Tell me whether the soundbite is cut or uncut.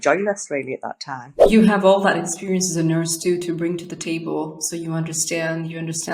cut